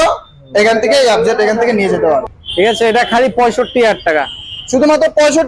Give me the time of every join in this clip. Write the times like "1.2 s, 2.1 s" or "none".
2.4 s